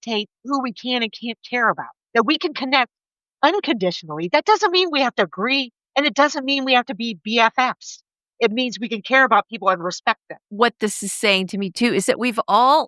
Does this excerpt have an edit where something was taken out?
yes; 2 cuts; at 1.9 s, 10.4 s

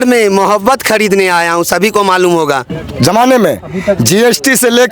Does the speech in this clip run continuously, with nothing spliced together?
no; 1 cut; at 2.7 s

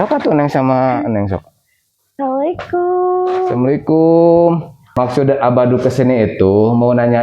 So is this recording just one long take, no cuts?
no; 1 cut; at 4.8 s

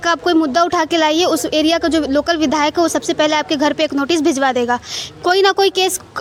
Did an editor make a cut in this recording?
no; 0 cuts

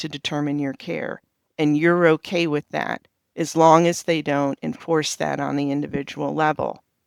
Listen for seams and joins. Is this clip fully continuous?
yes; 0 cuts

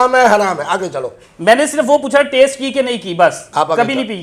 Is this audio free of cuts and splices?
yes; 0 cuts

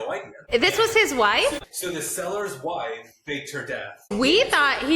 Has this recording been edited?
yes; 2 cuts; at 1.6 s, 4.1 s

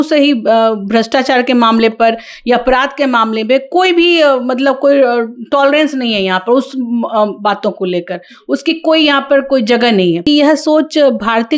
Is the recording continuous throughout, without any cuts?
no; 1 cut; at 10.2 s

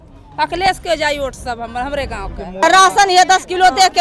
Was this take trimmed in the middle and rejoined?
yes; 1 cut; at 2.6 s

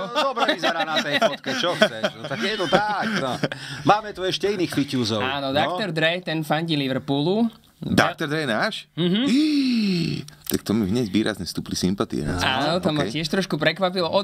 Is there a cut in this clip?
no; 0 cuts

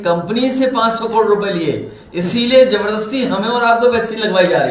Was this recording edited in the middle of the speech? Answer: no; 0 cuts

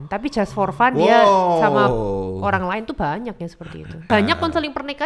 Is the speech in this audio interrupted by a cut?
yes; 1 cut; at 4.0 s

